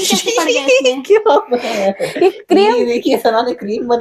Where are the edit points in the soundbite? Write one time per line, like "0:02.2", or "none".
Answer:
none